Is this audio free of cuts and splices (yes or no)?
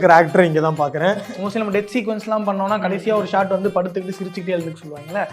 no